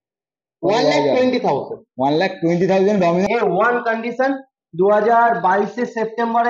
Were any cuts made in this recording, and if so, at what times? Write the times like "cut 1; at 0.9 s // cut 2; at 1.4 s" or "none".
cut 1; at 3.3 s